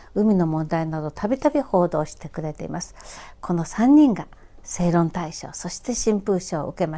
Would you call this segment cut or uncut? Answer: uncut